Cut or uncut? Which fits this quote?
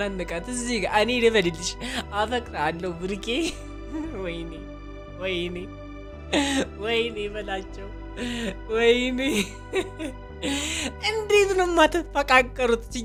uncut